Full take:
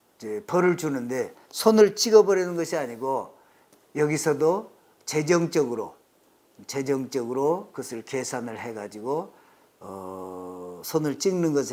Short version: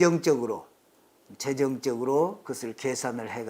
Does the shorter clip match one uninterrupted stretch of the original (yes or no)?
yes